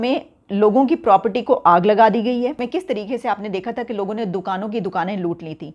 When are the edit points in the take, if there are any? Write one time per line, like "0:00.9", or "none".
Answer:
0:02.6